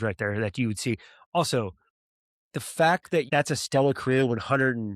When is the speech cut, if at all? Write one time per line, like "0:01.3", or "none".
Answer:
0:03.3